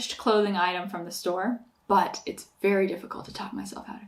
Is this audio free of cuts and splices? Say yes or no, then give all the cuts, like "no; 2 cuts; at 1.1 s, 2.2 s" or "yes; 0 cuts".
no; 1 cut; at 1.7 s